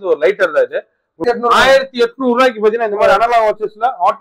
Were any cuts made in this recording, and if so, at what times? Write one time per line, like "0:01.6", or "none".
0:01.2